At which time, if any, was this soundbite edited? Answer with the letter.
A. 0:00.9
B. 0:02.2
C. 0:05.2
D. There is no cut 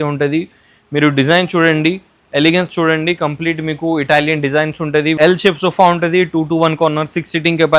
C